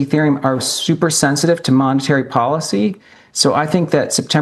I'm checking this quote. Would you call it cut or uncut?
uncut